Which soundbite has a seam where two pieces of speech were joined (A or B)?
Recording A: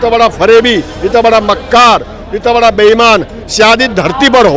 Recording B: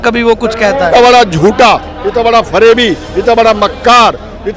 B